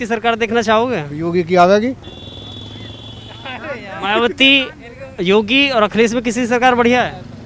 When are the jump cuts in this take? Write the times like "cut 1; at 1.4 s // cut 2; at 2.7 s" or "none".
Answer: none